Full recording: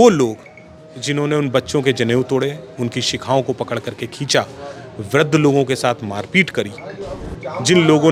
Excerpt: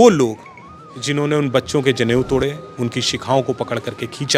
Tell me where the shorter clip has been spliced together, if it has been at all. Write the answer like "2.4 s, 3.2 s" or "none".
none